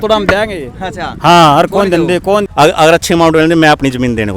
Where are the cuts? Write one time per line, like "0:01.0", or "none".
0:02.5